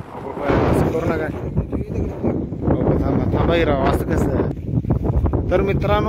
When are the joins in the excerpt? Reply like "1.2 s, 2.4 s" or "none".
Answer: 4.5 s